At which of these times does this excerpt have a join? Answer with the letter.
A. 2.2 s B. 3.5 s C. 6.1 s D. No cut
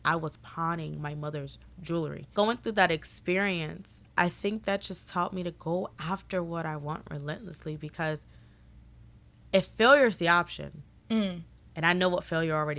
A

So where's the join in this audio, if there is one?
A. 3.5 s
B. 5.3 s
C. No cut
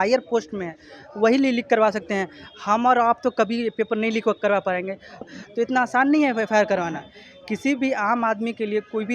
B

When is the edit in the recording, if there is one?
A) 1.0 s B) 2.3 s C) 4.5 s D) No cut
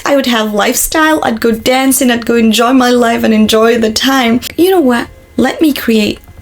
C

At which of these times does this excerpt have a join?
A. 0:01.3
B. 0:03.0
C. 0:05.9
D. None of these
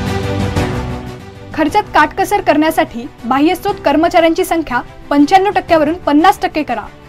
A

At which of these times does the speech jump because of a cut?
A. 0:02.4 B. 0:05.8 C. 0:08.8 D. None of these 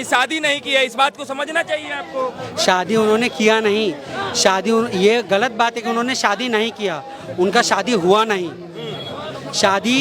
D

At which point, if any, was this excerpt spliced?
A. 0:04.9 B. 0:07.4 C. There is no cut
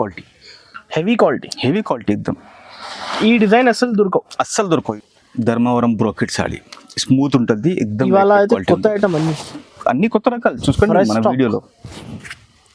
A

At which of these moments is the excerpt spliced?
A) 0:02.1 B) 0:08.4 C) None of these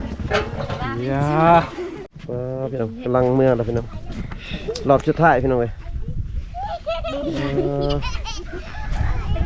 A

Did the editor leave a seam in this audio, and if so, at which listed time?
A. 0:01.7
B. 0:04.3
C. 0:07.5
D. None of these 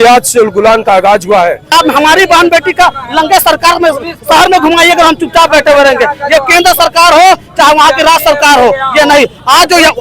A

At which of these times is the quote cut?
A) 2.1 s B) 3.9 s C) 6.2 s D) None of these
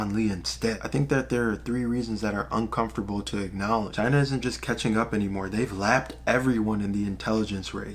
B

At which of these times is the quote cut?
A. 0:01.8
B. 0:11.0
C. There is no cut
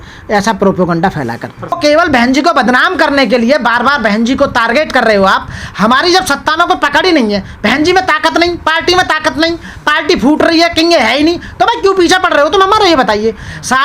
A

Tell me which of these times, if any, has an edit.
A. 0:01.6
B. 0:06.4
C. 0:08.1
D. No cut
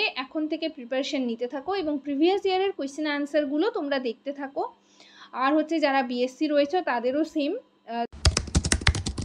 C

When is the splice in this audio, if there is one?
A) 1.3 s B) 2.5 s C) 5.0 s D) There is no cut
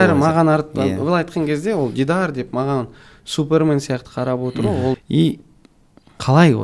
C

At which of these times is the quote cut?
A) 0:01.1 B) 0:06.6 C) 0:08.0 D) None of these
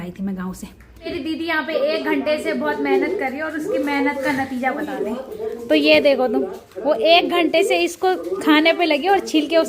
A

